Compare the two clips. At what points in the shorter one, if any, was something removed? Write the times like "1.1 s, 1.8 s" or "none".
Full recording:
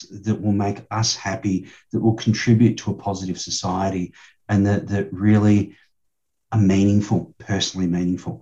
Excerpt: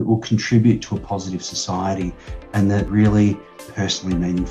2.9 s, 3.6 s